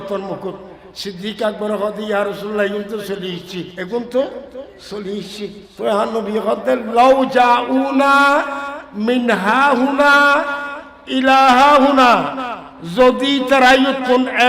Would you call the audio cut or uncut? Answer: cut